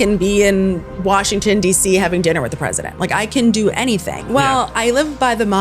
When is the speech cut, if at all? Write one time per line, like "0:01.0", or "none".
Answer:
0:04.2